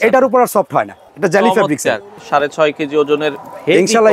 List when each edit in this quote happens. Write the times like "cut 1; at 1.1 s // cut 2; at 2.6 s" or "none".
cut 1; at 1.0 s // cut 2; at 2.2 s